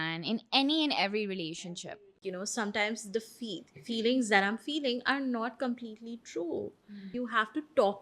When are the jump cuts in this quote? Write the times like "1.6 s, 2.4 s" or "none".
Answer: 1.8 s, 7.0 s